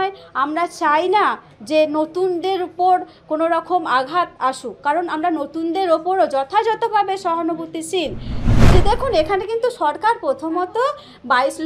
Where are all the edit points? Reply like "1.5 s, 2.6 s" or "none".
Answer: 8.5 s